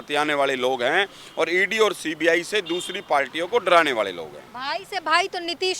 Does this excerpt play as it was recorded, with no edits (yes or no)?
yes